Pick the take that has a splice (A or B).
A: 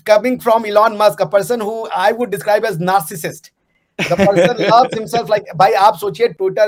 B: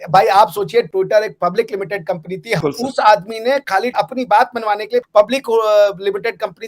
B